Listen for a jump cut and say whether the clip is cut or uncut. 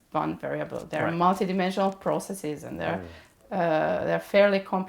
uncut